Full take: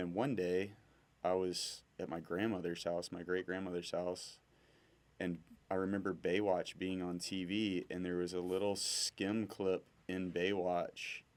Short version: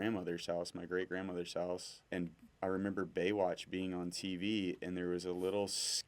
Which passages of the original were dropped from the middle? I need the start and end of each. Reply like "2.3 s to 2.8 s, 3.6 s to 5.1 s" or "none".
4.3 s to 5.0 s